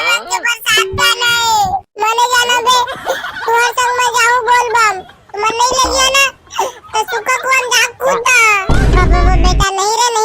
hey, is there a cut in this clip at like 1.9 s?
yes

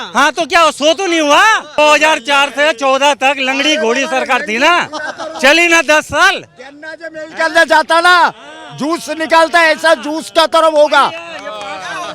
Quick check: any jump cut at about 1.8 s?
yes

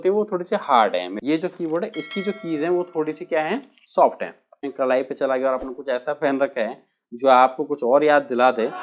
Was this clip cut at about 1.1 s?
yes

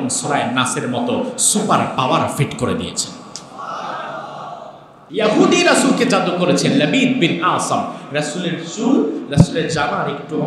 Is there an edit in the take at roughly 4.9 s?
yes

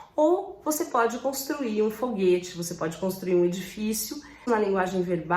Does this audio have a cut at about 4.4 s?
yes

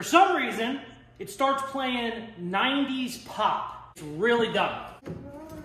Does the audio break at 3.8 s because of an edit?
yes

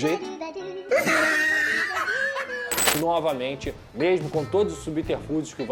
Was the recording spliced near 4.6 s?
no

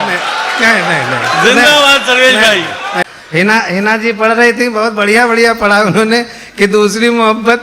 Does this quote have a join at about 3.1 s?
yes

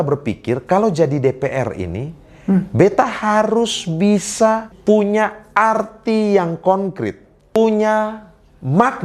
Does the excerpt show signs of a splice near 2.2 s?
no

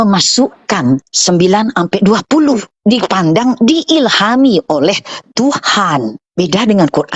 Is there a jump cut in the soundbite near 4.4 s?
no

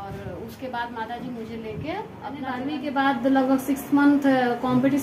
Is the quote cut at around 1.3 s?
no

